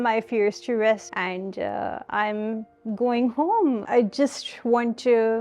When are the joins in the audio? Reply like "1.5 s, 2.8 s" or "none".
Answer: 1.1 s